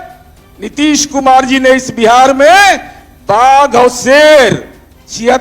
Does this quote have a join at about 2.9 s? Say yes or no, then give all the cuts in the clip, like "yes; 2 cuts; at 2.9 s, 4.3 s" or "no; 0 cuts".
no; 0 cuts